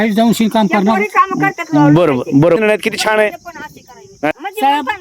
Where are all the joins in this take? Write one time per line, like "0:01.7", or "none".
0:02.6
0:04.3